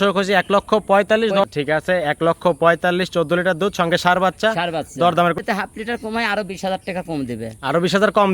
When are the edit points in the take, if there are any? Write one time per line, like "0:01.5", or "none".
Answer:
0:01.5
0:05.4